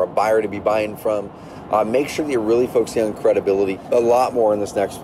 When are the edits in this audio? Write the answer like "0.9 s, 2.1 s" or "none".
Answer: 3.7 s